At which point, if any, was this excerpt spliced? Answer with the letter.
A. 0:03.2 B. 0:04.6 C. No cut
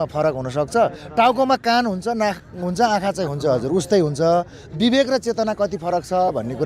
C